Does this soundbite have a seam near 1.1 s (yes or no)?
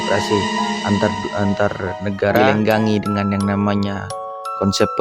no